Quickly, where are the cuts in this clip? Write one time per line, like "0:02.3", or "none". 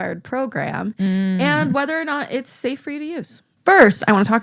0:03.5

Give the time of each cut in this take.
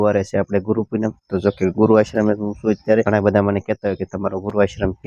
0:03.1

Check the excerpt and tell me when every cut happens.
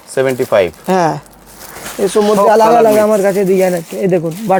none

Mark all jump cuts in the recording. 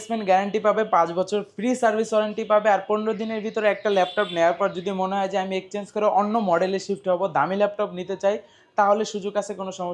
none

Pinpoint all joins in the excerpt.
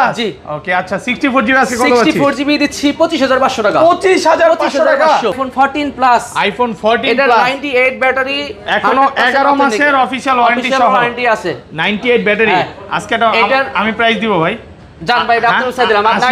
0:05.4

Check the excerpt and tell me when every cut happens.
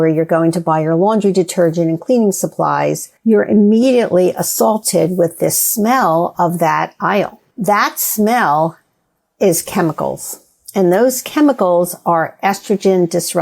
0:03.1
0:07.4

